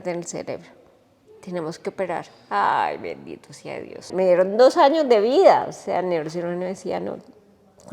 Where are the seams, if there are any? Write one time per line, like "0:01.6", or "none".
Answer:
0:04.1